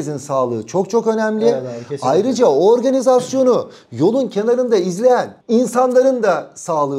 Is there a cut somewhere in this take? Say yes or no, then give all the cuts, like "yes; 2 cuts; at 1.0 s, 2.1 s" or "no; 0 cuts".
no; 0 cuts